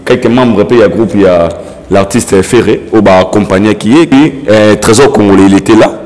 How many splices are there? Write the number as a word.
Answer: one